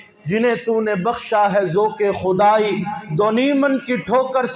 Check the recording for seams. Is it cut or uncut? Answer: uncut